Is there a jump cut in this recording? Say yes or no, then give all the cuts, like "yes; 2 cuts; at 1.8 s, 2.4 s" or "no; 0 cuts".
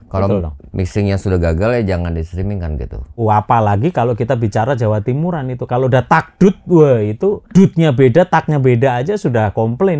yes; 1 cut; at 3.2 s